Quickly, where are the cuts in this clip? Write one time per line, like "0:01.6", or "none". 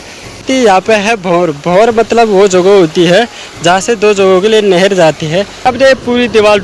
0:00.7
0:05.7